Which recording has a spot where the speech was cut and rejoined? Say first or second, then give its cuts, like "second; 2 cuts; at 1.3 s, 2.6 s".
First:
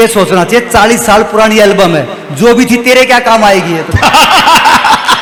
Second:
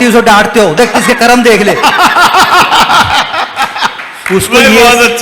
second; 1 cut; at 4.0 s